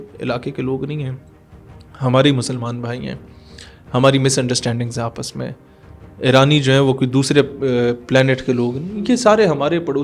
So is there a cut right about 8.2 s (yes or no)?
no